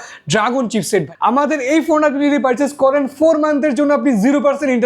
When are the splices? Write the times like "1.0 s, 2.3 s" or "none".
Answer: 1.1 s